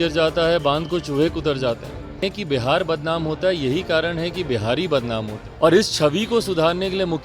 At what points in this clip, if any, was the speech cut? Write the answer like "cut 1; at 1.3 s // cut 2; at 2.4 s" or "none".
cut 1; at 2.3 s // cut 2; at 5.4 s

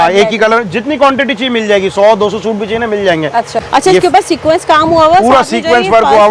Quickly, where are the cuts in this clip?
cut 1; at 3.7 s

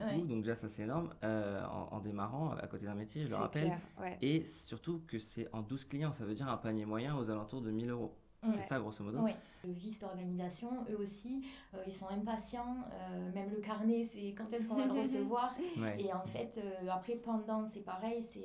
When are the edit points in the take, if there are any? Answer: cut 1; at 9.7 s

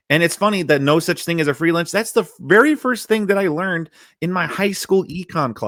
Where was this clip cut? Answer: none

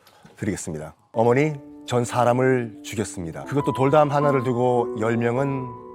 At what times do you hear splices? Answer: cut 1; at 1.1 s // cut 2; at 3.4 s

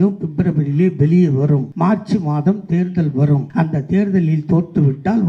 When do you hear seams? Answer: cut 1; at 1.7 s // cut 2; at 3.5 s

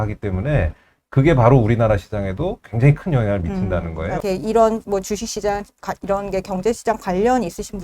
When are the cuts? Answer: cut 1; at 4.2 s

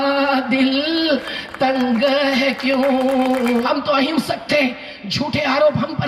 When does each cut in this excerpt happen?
cut 1; at 3.6 s

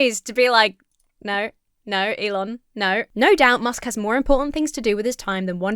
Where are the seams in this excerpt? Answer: cut 1; at 3.1 s

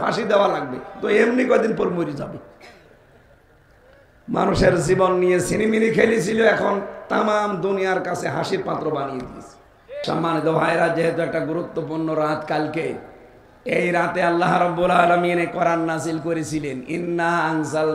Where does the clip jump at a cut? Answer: cut 1; at 10.0 s

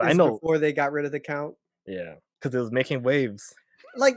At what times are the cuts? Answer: cut 1; at 2.2 s

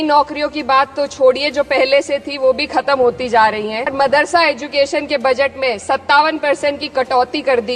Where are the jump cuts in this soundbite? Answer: cut 1; at 3.9 s

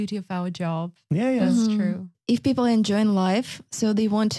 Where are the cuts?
cut 1; at 2.1 s

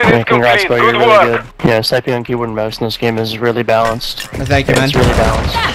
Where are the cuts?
cut 1; at 1.5 s

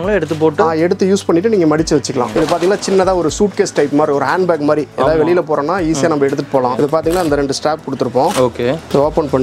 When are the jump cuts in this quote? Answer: cut 1; at 2.3 s // cut 2; at 6.8 s

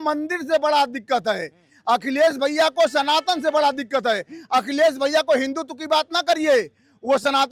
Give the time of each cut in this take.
none

